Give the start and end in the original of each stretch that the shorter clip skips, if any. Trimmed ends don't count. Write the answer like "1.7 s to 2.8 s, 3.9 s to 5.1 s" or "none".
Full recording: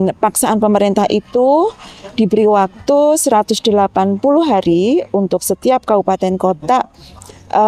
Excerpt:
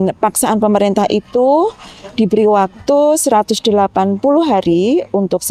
none